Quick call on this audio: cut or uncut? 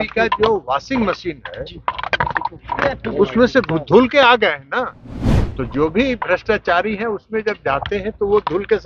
uncut